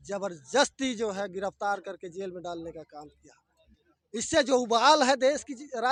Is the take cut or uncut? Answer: uncut